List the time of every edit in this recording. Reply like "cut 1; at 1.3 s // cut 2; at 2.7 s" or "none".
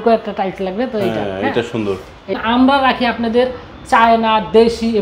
cut 1; at 2.4 s

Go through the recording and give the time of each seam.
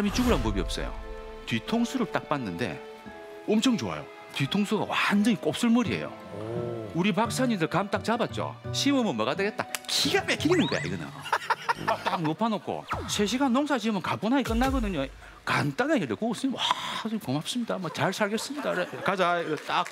cut 1; at 12.1 s

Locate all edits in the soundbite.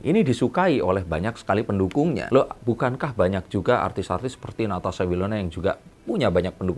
none

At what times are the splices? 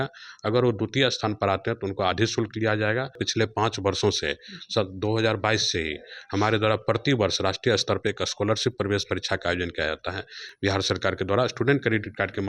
cut 1; at 3.2 s // cut 2; at 10.4 s

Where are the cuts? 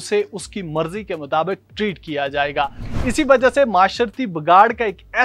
cut 1; at 2.8 s

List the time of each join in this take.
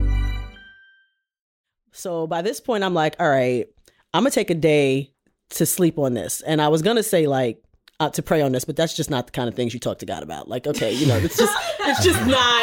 cut 1; at 1.5 s

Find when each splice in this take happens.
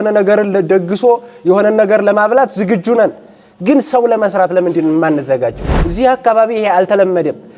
cut 1; at 5.6 s

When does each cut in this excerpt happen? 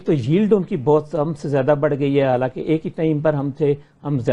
none

